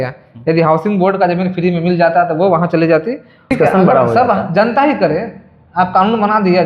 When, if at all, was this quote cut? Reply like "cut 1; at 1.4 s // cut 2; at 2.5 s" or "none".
cut 1; at 3.5 s

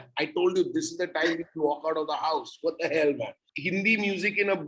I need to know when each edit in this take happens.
cut 1; at 3.5 s

